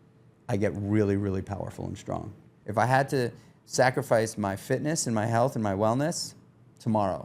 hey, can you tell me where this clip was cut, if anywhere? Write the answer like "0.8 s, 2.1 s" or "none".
2.6 s